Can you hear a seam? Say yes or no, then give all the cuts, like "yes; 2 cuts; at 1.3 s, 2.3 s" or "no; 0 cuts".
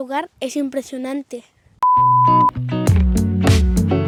no; 0 cuts